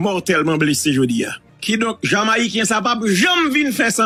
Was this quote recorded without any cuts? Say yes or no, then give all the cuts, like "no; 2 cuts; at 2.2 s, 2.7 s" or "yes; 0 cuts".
yes; 0 cuts